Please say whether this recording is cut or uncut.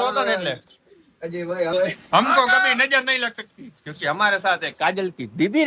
cut